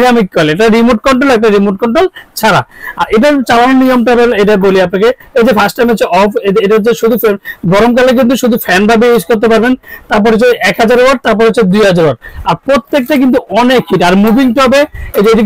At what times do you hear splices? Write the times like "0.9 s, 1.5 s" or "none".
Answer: none